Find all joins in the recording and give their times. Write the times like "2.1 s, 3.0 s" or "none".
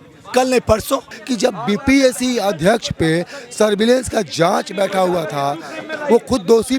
1.2 s